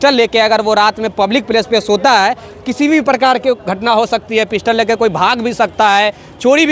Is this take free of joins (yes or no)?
yes